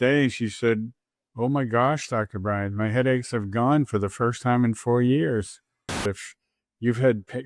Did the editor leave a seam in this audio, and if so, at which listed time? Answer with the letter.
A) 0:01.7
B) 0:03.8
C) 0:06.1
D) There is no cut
C